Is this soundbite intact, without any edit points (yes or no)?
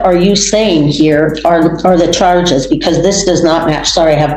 yes